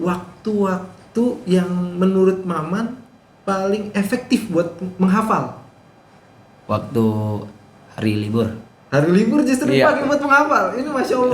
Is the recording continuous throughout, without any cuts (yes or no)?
yes